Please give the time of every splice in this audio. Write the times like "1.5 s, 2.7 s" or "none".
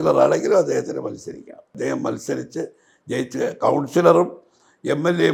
none